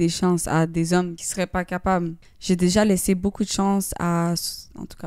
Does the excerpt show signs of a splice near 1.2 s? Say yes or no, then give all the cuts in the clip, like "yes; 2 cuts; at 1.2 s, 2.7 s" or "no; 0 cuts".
yes; 2 cuts; at 1.2 s, 2.3 s